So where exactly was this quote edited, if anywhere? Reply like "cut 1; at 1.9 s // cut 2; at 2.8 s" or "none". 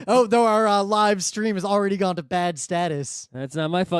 cut 1; at 1.3 s